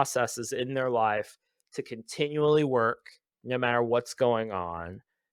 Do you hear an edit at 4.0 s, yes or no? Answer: no